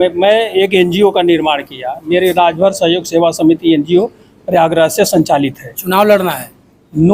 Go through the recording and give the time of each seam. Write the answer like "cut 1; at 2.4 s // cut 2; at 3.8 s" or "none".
none